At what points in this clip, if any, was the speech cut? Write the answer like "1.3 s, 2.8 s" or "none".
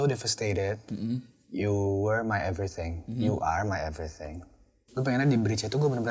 4.8 s